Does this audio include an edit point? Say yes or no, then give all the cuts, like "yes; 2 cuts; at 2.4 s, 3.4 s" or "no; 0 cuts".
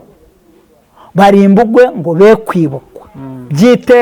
no; 0 cuts